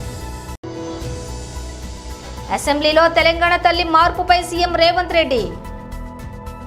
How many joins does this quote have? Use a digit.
1